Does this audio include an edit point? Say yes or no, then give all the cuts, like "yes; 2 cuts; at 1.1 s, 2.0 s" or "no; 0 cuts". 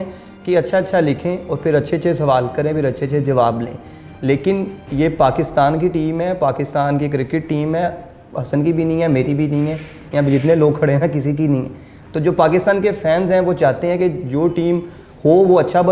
no; 0 cuts